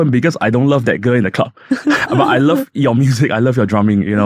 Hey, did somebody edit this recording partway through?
no; 0 cuts

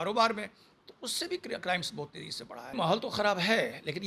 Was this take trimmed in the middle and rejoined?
yes; 1 cut; at 2.8 s

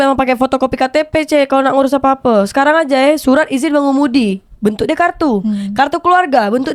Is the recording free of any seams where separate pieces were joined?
yes; 0 cuts

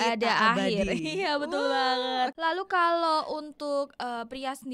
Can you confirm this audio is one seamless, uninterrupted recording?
no; 1 cut; at 2.3 s

